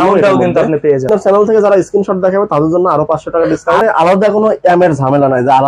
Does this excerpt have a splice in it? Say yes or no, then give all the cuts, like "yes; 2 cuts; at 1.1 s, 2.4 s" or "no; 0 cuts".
yes; 2 cuts; at 1.0 s, 3.8 s